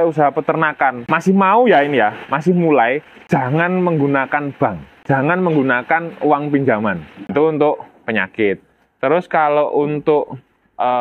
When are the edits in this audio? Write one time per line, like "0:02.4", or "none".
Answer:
0:01.1
0:03.1
0:04.9
0:07.2